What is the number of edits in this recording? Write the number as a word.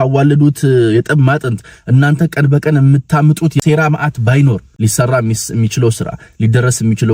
two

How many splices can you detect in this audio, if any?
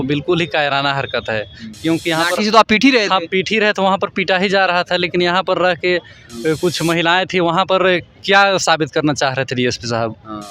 zero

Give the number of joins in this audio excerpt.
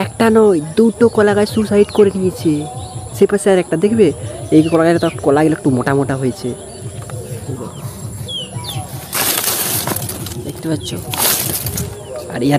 zero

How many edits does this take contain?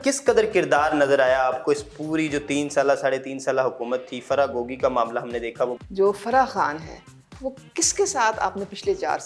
one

